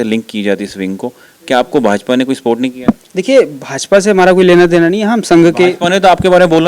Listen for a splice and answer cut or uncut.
uncut